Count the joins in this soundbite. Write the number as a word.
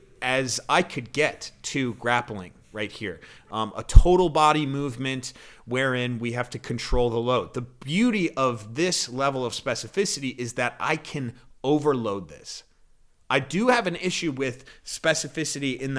zero